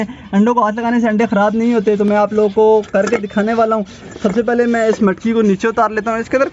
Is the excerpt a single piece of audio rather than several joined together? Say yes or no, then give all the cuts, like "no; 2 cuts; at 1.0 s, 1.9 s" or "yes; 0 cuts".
yes; 0 cuts